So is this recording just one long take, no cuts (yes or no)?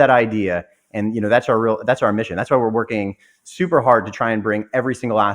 yes